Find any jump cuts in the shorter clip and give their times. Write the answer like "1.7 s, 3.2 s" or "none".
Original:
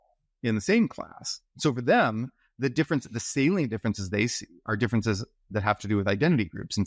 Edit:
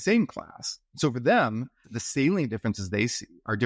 1.9 s